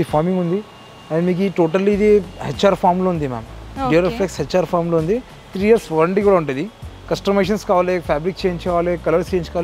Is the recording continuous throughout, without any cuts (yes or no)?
yes